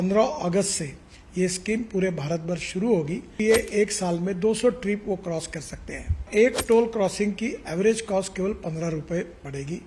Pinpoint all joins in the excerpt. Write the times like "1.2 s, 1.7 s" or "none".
3.3 s, 6.3 s